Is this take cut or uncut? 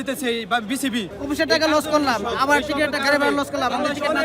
cut